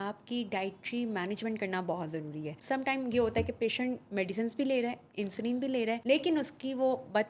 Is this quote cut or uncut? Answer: cut